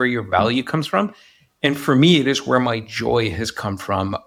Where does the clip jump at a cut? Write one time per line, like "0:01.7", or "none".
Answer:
none